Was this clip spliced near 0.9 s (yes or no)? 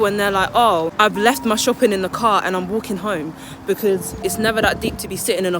yes